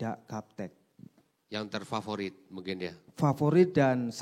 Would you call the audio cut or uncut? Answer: uncut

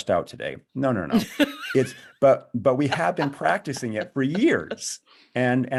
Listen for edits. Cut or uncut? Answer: uncut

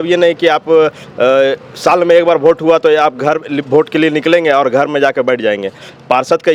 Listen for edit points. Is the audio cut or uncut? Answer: uncut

